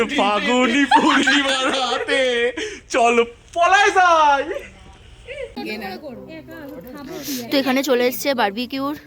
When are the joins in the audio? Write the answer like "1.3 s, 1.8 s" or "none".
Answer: 5.5 s